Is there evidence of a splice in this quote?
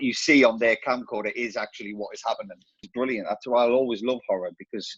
yes; 1 cut; at 2.8 s

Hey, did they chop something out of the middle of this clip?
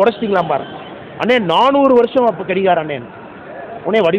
no; 0 cuts

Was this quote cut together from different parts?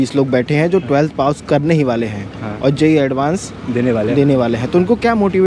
no; 0 cuts

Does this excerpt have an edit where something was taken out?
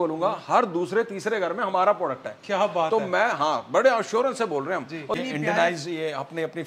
yes; 1 cut; at 5.2 s

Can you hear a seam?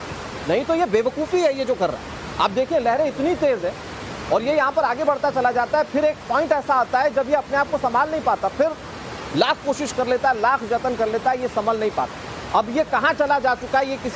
no; 0 cuts

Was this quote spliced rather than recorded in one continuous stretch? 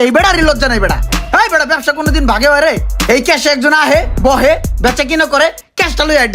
no; 0 cuts

